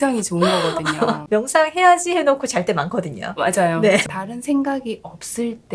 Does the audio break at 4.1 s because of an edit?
yes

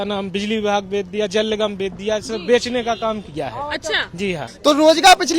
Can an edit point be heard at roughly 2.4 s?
no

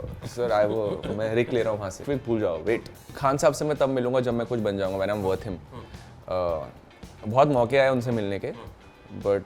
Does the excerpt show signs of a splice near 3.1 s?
yes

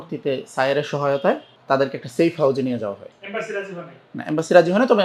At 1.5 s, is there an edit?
yes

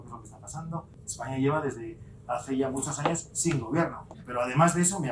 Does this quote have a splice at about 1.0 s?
yes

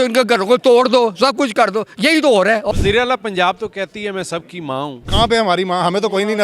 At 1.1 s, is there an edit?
no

